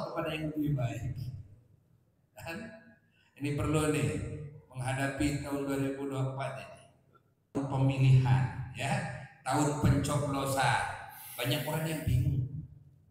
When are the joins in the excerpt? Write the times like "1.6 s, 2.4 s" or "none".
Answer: 7.6 s